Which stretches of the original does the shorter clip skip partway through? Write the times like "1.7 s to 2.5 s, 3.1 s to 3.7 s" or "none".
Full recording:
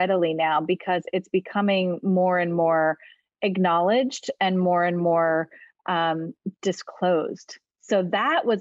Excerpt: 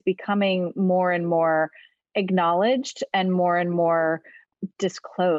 5.7 s to 6.3 s